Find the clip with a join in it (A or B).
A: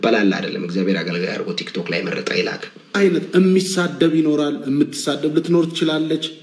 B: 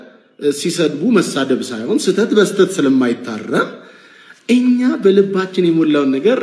A